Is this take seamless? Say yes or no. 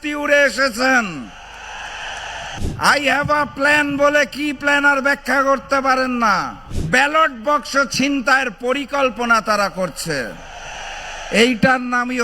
no